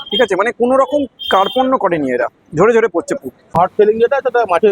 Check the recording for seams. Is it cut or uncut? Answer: cut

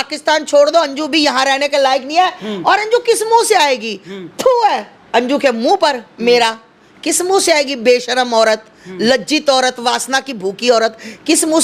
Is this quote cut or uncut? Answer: uncut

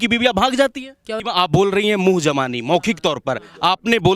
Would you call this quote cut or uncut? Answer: cut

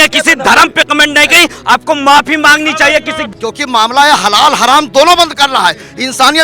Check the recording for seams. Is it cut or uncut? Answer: cut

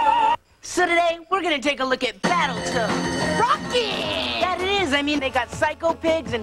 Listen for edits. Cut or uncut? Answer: uncut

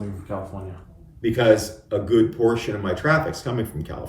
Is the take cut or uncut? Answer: cut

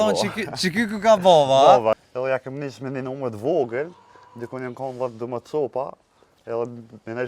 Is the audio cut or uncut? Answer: cut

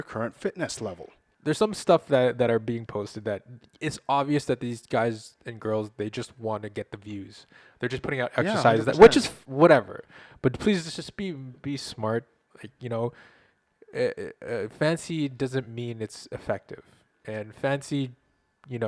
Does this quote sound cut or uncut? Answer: cut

